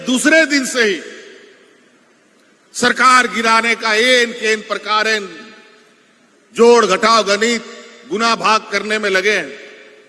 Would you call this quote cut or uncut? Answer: uncut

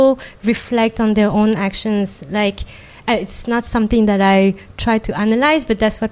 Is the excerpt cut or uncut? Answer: uncut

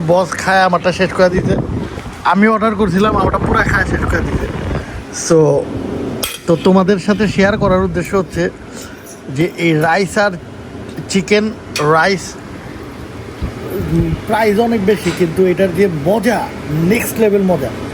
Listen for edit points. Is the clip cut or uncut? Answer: uncut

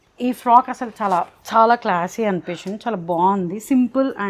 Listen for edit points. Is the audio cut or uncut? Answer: uncut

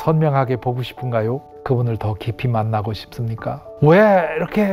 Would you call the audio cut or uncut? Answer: cut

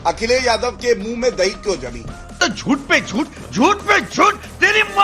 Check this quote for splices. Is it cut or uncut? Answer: uncut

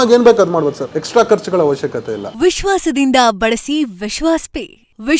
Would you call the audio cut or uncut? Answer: cut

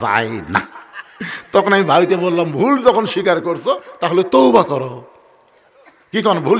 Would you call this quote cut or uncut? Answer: uncut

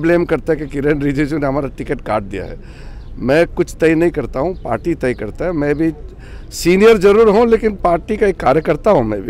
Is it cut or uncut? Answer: uncut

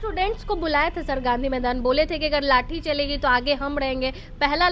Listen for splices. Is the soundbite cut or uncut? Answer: uncut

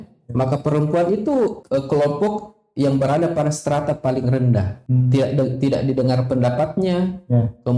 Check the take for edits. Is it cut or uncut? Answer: cut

